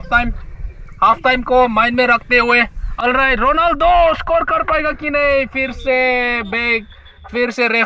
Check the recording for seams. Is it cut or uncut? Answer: cut